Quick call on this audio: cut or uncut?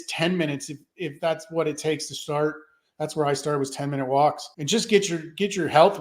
cut